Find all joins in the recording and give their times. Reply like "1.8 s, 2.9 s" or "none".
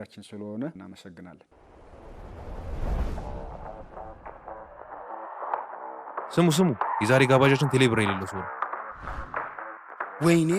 1.4 s